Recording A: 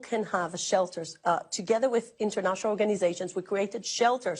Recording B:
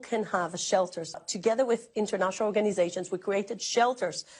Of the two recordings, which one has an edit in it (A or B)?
B